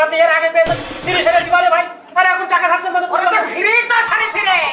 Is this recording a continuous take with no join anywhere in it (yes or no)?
yes